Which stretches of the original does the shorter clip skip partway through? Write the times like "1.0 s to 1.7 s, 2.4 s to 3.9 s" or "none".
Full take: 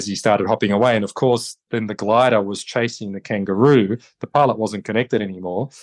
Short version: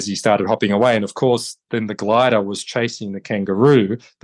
none

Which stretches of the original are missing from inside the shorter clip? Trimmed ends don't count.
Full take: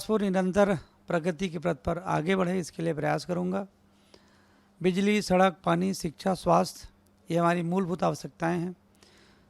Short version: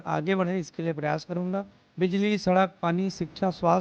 3.8 s to 4.6 s

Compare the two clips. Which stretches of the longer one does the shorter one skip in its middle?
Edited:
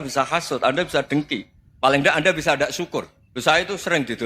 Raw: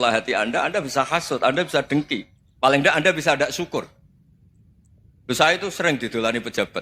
4.0 s to 5.2 s

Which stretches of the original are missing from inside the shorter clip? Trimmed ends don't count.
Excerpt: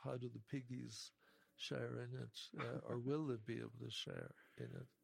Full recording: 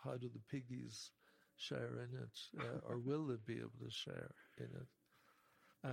none

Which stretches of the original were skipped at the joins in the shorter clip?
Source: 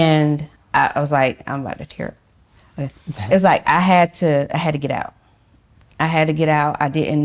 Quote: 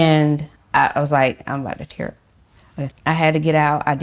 2.9 s to 5.9 s

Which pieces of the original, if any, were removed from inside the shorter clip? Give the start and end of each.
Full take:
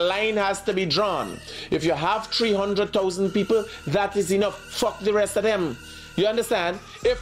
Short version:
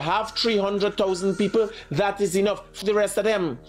4.7 s to 5.0 s

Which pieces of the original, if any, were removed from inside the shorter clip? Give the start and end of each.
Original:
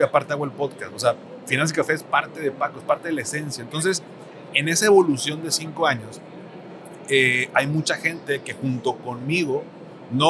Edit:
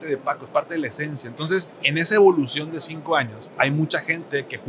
4.1 s to 4.5 s, 6.2 s to 7.4 s

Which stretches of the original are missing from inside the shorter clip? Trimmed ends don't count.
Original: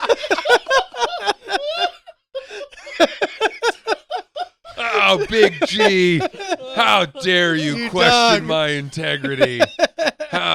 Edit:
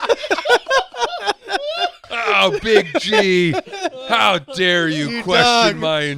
2.1 s to 4.7 s

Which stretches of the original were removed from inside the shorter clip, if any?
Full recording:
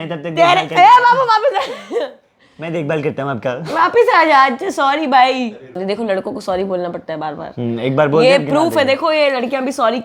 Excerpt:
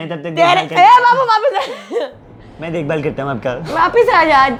none

